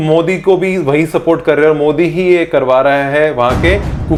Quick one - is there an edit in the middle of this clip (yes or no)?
no